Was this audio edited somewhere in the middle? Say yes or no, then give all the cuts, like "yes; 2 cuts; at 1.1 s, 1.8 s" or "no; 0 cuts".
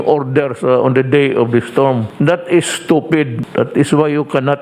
yes; 2 cuts; at 2.1 s, 3.4 s